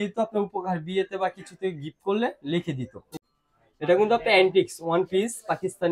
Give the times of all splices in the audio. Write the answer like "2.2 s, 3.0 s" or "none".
3.1 s